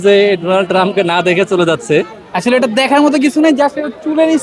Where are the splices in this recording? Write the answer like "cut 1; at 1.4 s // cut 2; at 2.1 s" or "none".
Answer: cut 1; at 2.2 s